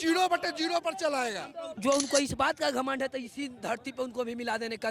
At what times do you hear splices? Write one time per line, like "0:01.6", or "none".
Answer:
0:01.7